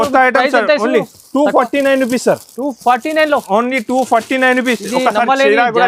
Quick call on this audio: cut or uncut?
uncut